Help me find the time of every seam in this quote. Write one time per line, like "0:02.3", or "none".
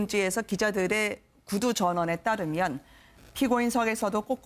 none